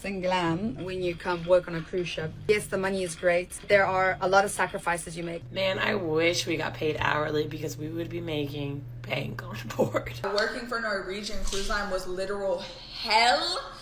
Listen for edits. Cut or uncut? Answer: cut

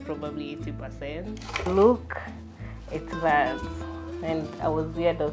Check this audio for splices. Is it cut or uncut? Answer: cut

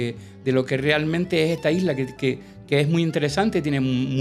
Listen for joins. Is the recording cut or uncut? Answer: uncut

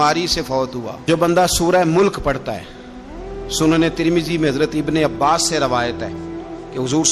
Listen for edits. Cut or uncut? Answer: cut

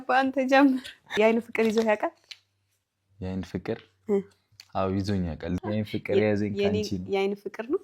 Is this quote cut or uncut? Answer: cut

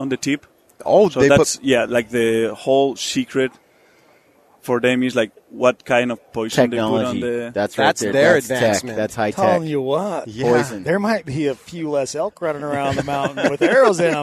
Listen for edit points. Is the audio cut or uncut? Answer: uncut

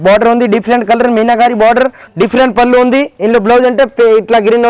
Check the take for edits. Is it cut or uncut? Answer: cut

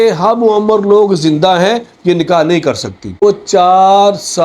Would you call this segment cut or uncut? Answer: cut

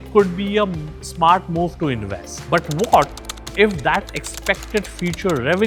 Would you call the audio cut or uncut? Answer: uncut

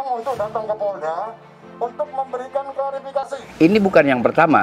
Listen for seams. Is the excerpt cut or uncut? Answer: cut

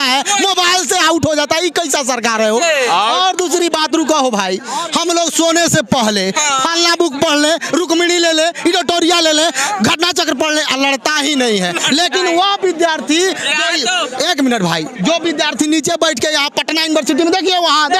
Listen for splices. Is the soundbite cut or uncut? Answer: uncut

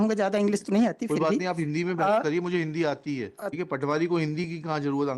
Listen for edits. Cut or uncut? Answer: cut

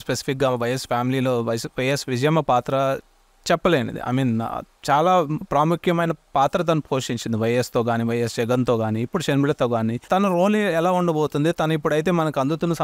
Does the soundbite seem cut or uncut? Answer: uncut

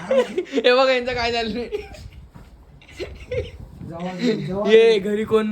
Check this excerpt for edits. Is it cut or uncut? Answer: uncut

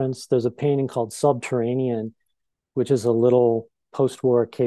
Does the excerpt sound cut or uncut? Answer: cut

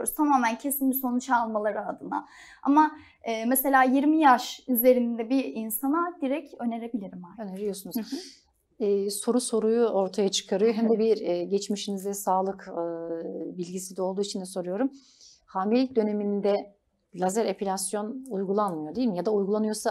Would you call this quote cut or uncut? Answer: uncut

